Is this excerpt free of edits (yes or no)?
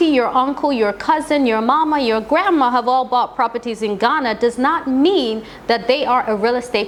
yes